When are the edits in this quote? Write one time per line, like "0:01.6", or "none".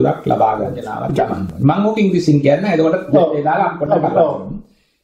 0:00.9